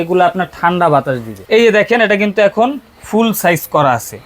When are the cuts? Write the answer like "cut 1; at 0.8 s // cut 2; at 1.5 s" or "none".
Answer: cut 1; at 1.3 s